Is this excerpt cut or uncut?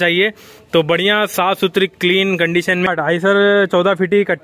cut